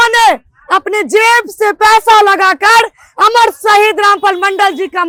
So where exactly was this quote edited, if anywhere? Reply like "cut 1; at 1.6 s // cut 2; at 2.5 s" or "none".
none